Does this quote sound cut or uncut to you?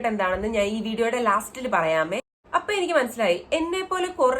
cut